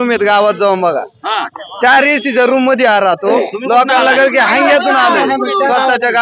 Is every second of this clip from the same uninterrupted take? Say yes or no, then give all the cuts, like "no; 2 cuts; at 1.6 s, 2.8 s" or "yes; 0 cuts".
yes; 0 cuts